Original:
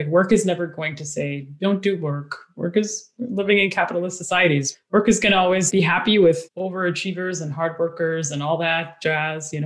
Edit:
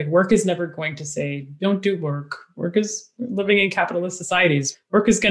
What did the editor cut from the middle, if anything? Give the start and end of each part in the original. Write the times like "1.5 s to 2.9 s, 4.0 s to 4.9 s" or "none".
none

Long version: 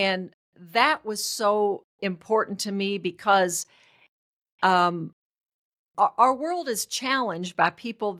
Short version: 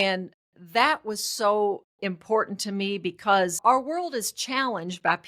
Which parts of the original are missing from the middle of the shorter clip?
3.6 s to 6.1 s

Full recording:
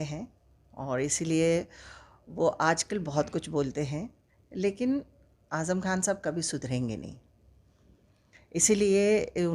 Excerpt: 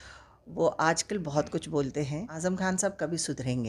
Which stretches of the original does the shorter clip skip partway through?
4.1 s to 5.5 s

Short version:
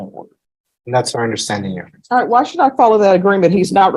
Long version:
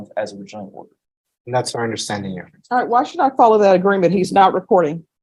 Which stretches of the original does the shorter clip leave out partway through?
none

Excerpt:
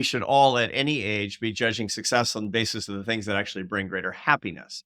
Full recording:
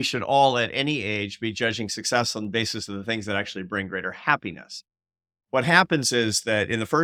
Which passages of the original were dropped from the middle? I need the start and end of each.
none

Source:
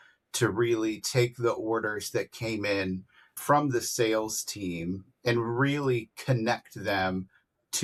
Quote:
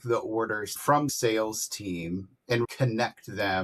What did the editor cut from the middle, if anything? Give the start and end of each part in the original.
2.4 s to 3.9 s, 5.4 s to 6.2 s

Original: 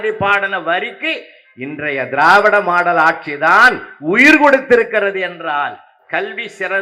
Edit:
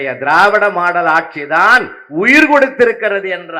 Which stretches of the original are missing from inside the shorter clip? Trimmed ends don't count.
none

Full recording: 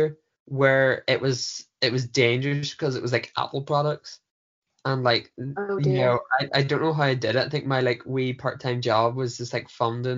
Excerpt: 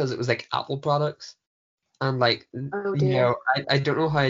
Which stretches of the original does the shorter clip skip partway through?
none

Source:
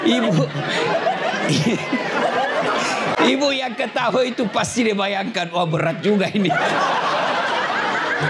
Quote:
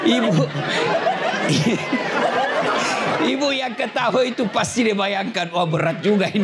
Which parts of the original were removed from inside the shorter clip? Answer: none

